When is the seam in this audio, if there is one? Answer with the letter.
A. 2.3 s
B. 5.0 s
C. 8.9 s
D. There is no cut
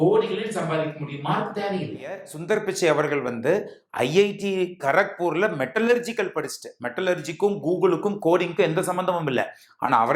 A